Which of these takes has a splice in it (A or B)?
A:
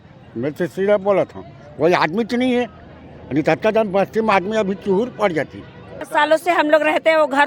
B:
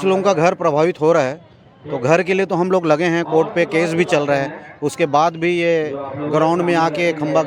A